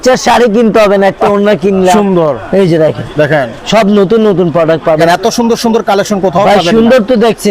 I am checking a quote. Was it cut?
yes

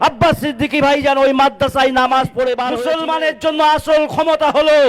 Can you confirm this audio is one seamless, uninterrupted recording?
no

